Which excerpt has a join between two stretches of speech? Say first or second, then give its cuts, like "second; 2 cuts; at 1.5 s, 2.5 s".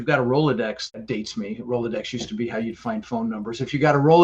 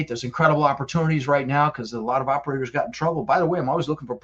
first; 1 cut; at 1.0 s